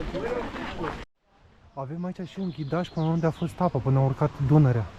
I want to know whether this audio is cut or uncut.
cut